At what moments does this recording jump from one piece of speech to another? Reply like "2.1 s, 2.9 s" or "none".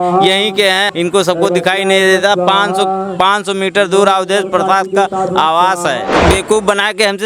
0.9 s, 6.1 s